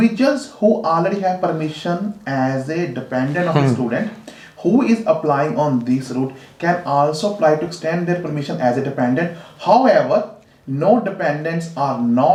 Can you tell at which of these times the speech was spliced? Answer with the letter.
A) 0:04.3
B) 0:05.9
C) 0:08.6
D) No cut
D